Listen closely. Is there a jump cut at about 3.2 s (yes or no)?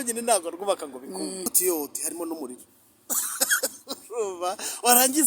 no